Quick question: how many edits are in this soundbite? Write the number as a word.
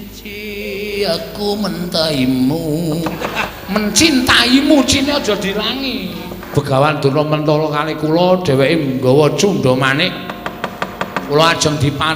two